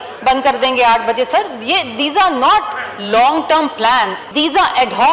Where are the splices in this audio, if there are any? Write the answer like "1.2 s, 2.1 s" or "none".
4.2 s